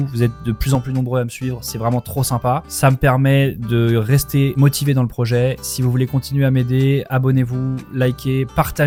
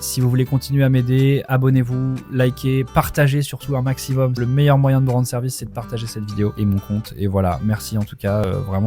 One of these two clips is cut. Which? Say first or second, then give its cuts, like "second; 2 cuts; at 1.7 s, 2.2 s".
second; 1 cut; at 4.3 s